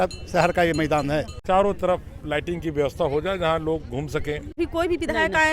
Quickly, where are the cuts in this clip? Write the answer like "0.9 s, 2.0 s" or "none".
1.3 s, 4.6 s